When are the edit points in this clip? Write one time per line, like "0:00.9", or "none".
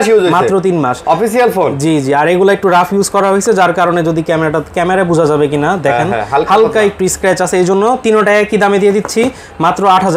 none